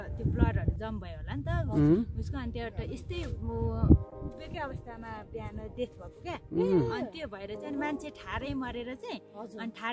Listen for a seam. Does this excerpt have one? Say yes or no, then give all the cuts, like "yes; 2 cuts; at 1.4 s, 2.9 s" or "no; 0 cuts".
no; 0 cuts